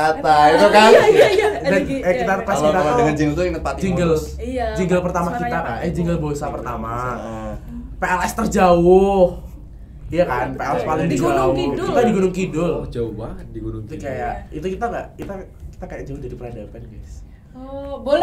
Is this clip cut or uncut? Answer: uncut